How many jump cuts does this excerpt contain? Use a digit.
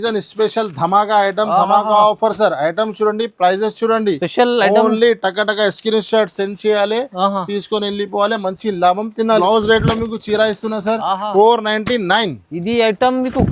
1